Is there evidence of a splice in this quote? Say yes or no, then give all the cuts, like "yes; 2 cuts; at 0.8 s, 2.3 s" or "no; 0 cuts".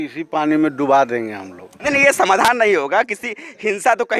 no; 0 cuts